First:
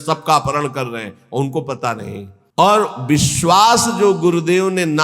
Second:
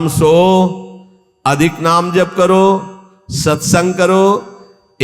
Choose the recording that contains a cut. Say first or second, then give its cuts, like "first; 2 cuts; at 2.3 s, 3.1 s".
first; 1 cut; at 2.4 s